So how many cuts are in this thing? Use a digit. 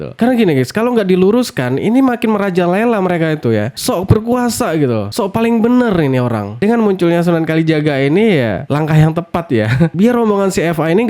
0